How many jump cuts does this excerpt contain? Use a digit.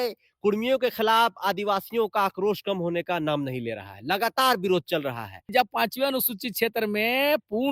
1